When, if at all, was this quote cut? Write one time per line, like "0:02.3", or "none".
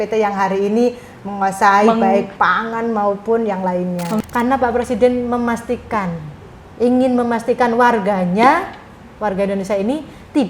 0:04.1